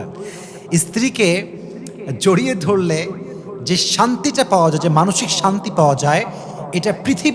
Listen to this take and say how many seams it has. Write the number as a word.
zero